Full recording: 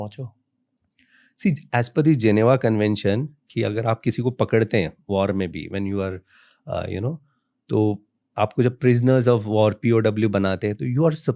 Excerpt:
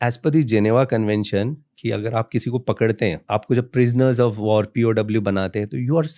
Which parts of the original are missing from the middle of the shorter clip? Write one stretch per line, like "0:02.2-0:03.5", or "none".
0:04.9-0:08.3